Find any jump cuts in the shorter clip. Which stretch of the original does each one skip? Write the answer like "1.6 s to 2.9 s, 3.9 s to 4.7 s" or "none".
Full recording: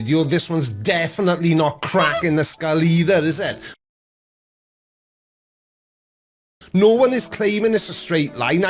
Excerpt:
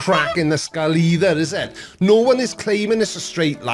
3.6 s to 6.5 s